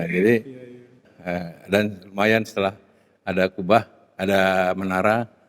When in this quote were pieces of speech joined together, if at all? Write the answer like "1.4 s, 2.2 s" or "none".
1.1 s